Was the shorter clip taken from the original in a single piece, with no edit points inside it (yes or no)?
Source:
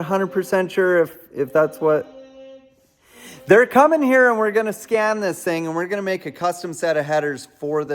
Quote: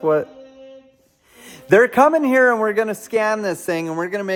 yes